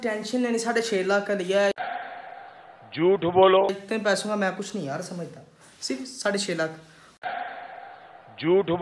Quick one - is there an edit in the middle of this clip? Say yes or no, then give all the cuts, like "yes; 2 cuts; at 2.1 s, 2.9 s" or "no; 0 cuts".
no; 0 cuts